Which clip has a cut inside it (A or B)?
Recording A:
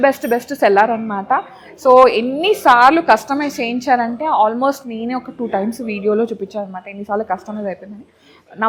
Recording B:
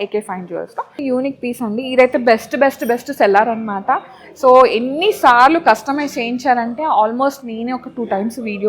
B